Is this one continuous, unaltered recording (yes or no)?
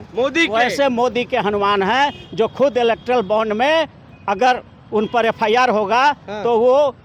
yes